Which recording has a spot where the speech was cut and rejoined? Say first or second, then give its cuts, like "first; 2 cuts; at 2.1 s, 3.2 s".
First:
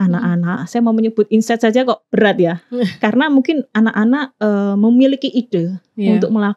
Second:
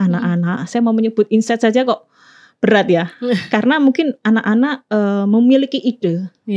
first; 1 cut; at 2.0 s